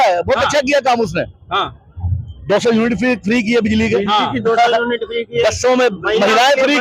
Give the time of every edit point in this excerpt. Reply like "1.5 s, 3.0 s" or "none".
none